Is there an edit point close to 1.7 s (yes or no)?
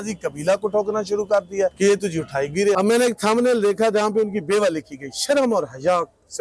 yes